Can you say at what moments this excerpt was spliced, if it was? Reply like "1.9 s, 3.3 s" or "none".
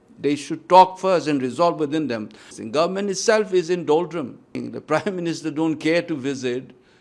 2.5 s, 4.6 s